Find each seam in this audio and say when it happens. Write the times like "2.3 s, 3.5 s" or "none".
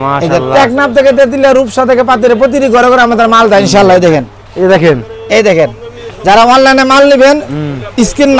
none